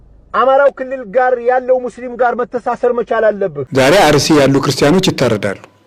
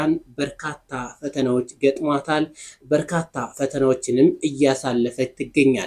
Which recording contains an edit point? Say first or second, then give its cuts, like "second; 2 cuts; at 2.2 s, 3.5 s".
first; 1 cut; at 3.6 s